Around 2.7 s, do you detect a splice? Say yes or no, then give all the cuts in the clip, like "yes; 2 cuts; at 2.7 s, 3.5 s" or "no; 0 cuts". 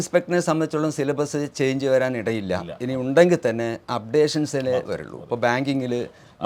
no; 0 cuts